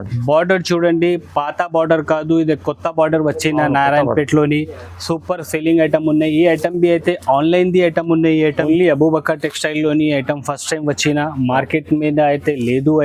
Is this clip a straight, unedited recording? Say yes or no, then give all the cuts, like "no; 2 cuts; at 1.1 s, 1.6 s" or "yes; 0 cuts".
yes; 0 cuts